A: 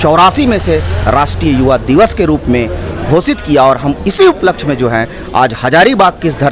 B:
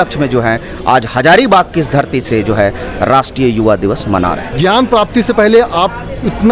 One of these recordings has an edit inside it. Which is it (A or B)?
B